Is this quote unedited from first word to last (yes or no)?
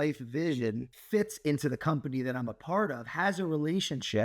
no